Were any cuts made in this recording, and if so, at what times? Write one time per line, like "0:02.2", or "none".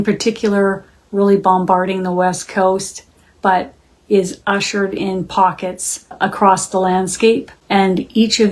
0:06.1
0:07.5